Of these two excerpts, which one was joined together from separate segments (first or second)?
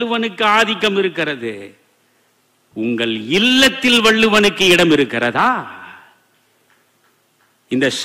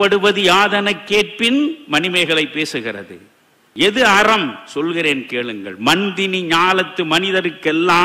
second